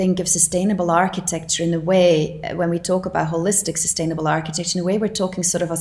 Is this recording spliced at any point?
no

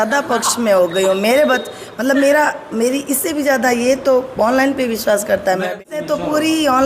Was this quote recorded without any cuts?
no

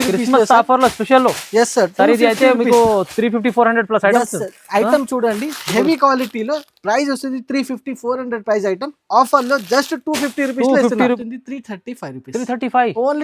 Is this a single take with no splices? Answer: no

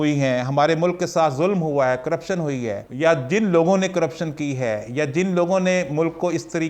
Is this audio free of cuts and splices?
no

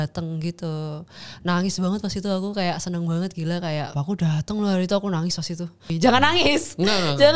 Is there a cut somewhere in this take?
yes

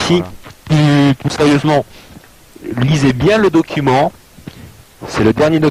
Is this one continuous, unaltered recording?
yes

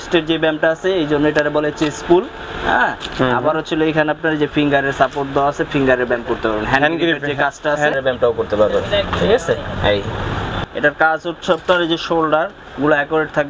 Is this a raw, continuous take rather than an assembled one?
no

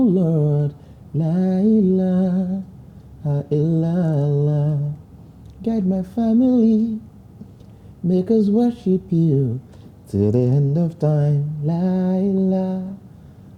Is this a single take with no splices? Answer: yes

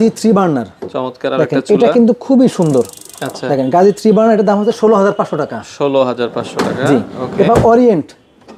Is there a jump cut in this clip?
no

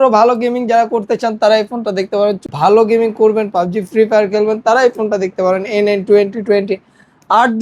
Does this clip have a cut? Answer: yes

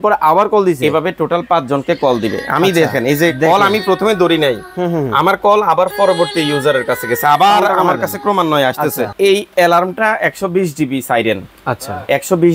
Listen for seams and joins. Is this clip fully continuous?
no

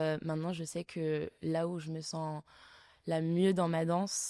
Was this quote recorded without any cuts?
yes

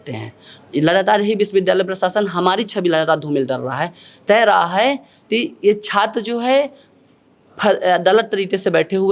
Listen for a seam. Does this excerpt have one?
no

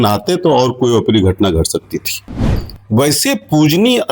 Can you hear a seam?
yes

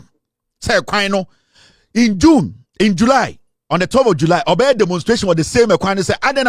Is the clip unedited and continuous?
yes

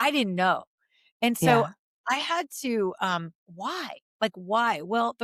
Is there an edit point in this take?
no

